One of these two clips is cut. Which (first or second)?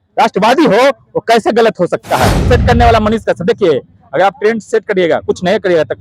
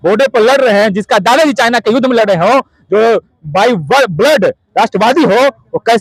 first